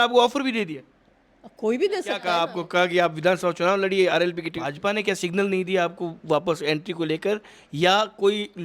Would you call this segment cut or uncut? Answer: cut